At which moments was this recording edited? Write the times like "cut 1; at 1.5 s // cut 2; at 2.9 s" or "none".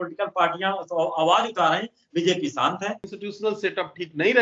cut 1; at 3.0 s